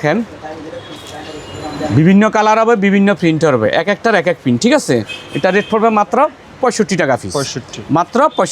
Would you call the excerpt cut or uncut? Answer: uncut